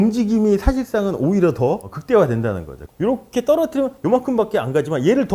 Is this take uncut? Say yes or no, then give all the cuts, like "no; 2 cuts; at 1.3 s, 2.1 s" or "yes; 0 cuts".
no; 1 cut; at 2.7 s